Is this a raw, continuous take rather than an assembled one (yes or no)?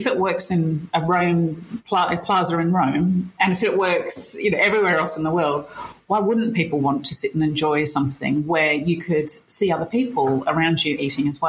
yes